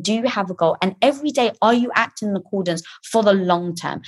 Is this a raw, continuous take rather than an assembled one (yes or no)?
yes